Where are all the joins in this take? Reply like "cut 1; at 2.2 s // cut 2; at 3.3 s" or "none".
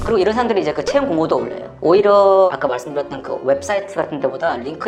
none